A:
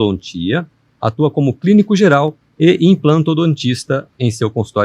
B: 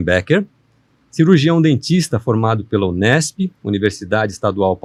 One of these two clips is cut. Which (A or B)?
A